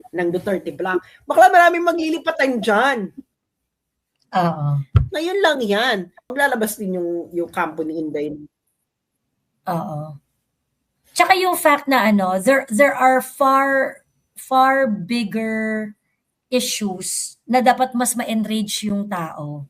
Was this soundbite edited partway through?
yes; 1 cut; at 6.3 s

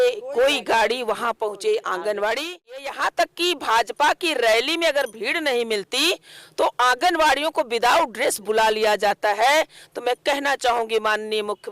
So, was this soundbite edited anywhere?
yes; 1 cut; at 2.9 s

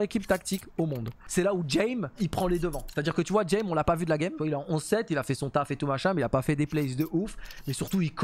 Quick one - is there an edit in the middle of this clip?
yes; 3 cuts; at 1.2 s, 2.2 s, 4.3 s

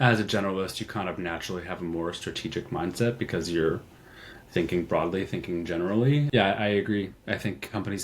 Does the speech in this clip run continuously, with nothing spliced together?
no; 1 cut; at 6.3 s

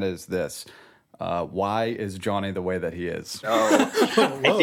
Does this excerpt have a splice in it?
yes; 1 cut; at 3.5 s

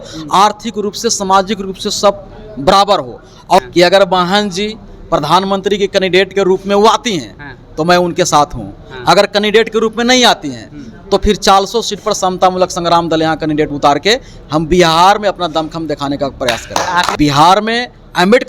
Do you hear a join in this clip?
yes; 2 cuts; at 3.6 s, 17.1 s

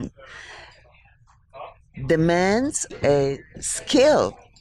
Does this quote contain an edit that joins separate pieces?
yes; 1 cut; at 2.9 s

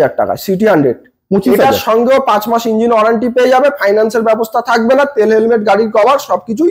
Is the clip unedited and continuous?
yes; 0 cuts

